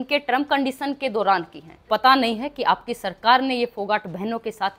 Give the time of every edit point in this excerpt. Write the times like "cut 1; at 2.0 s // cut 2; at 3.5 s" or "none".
cut 1; at 1.9 s